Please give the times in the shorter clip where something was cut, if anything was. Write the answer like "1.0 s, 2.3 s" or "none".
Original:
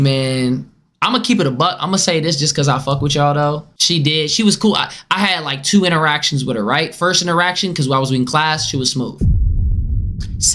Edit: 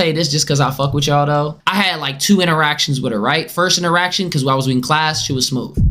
1.6 s